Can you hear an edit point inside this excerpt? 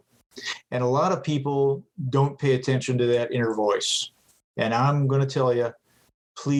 no; 0 cuts

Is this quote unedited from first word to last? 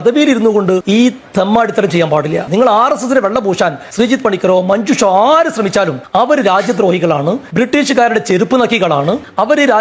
no; 4 cuts; at 0.8 s, 3.8 s, 6.0 s, 7.4 s

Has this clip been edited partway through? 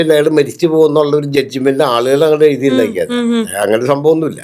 no; 0 cuts

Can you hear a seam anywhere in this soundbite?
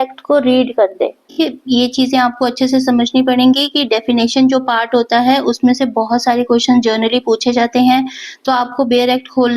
yes; 1 cut; at 1.3 s

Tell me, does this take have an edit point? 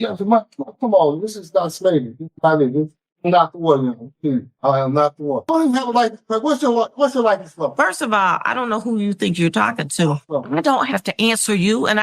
yes; 2 cuts; at 5.4 s, 10.2 s

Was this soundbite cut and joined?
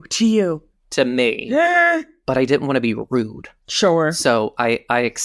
yes; 1 cut; at 2.1 s

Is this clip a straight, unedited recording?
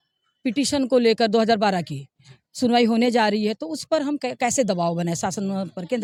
yes; 0 cuts

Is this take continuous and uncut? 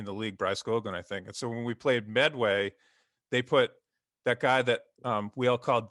yes; 0 cuts

